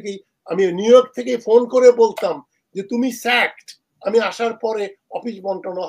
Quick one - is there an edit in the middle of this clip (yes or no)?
no